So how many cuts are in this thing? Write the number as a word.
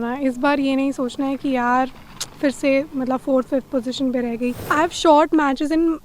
one